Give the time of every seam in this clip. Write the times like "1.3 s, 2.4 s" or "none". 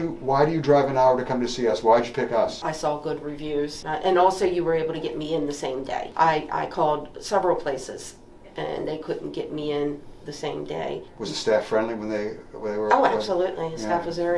2.6 s, 3.8 s, 6.1 s, 11.1 s